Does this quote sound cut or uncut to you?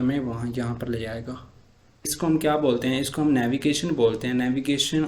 cut